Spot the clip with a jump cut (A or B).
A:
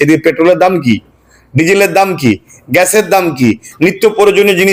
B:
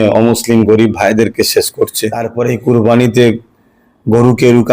B